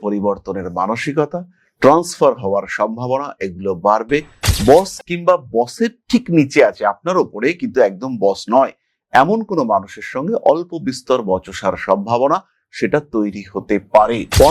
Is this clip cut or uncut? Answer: uncut